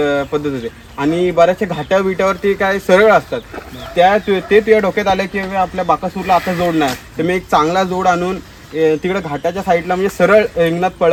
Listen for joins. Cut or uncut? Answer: uncut